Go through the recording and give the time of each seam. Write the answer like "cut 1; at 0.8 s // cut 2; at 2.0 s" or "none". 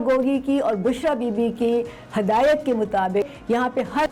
none

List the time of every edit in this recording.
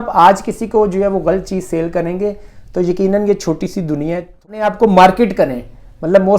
cut 1; at 4.5 s

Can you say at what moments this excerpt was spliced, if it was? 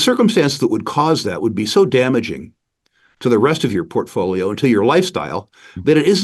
none

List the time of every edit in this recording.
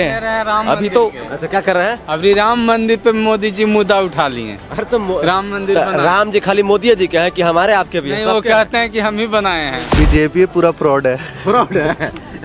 cut 1; at 9.9 s

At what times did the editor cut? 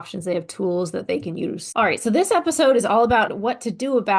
cut 1; at 1.6 s // cut 2; at 3.3 s

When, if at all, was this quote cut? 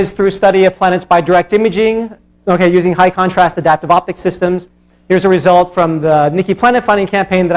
none

